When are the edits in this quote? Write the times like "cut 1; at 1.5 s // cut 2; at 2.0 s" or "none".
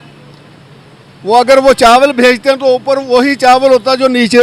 none